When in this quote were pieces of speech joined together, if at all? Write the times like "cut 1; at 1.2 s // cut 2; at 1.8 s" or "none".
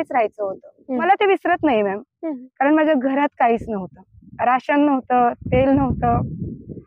cut 1; at 1.0 s